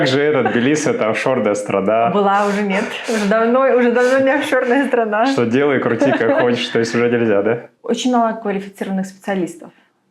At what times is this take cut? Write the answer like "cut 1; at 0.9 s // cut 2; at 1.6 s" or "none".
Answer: cut 1; at 7.7 s